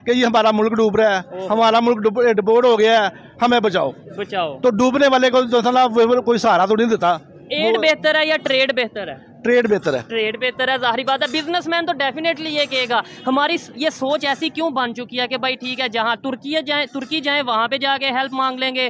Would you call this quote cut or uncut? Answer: uncut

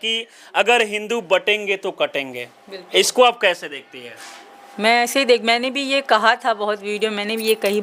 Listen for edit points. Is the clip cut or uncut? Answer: uncut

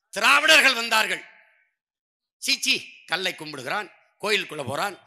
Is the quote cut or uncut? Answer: uncut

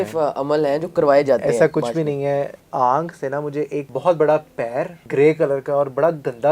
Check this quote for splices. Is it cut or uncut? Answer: cut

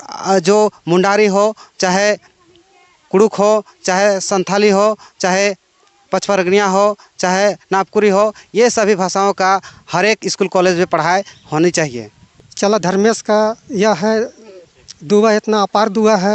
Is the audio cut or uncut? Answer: cut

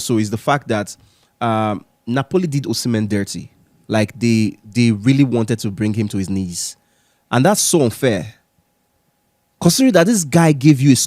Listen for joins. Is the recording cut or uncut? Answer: uncut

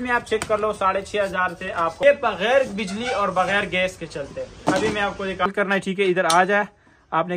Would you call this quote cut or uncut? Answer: cut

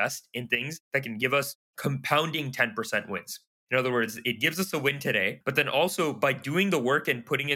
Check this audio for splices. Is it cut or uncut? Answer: uncut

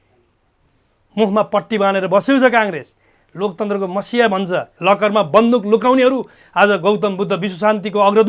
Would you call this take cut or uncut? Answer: cut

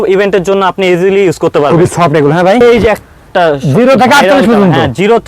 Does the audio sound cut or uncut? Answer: cut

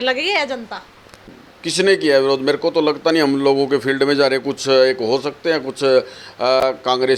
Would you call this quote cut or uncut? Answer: uncut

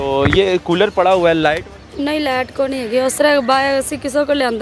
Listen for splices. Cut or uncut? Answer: cut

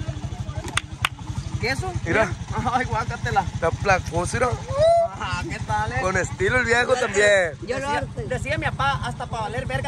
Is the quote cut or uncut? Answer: uncut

